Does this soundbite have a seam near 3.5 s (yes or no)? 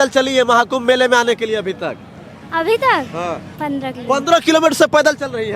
yes